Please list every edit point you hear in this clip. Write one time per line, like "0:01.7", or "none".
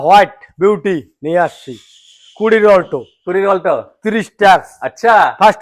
none